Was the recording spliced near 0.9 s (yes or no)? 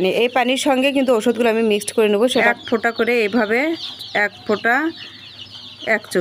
no